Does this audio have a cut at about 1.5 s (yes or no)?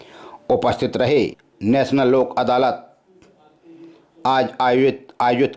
yes